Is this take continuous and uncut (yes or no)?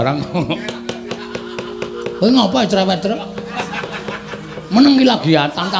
yes